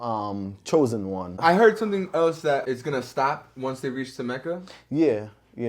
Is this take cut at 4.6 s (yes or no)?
no